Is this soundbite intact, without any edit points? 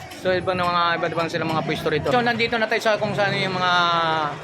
no; 1 cut; at 2.1 s

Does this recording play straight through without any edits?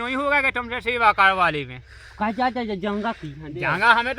yes; 0 cuts

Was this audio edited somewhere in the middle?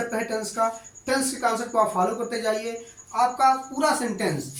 no; 0 cuts

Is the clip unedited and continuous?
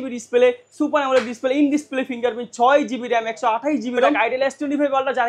no; 1 cut; at 4.2 s

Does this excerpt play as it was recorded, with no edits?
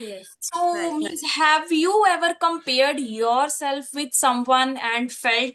yes; 0 cuts

